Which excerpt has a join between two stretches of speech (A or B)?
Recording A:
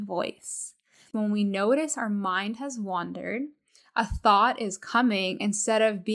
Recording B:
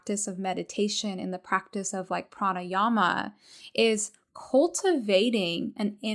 A